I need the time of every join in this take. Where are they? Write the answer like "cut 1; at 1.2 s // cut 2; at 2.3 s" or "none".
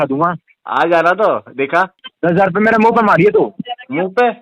cut 1; at 2.0 s